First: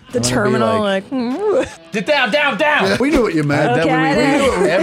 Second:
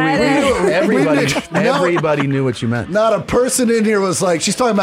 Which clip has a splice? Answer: first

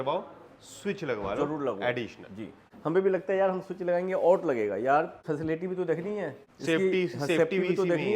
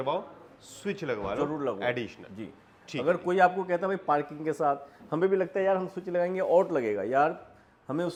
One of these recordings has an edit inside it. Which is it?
first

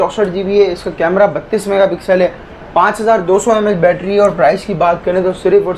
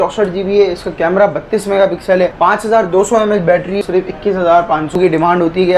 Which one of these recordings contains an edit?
second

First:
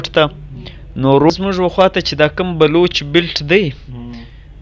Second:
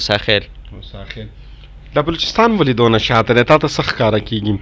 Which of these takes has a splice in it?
first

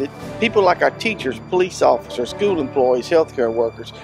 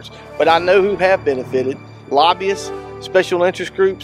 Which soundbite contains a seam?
second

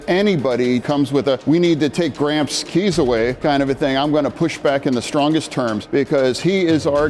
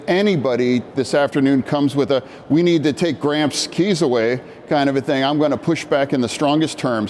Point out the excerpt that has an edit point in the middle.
first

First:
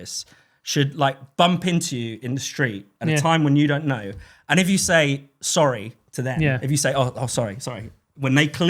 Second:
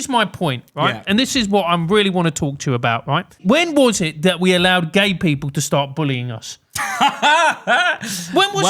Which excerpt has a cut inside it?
second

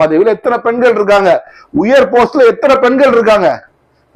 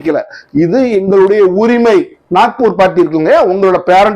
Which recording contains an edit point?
second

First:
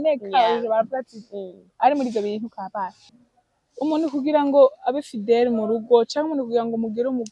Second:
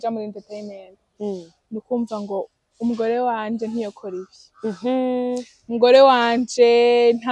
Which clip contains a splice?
first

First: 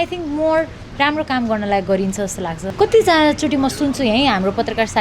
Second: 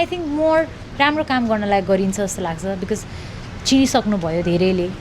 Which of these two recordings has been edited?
first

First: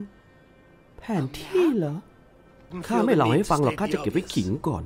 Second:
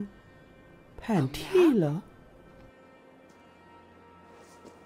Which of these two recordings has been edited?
first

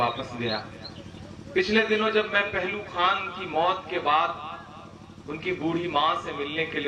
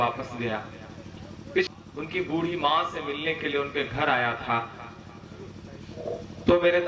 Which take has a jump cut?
second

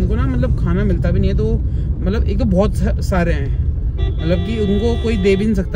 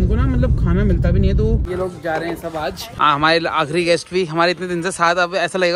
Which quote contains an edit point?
second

